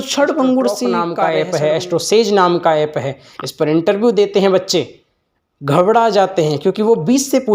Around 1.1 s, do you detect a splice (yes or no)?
yes